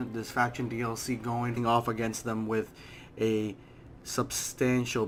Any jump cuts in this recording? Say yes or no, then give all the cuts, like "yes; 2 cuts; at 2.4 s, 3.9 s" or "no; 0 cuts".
no; 0 cuts